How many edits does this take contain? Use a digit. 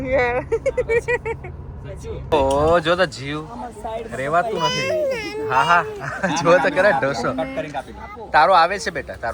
1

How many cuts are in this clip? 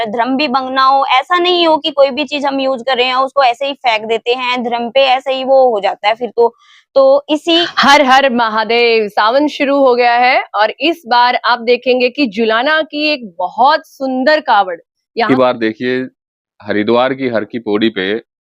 2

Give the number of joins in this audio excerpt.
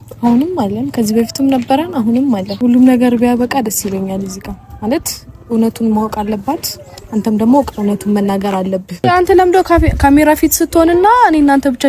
2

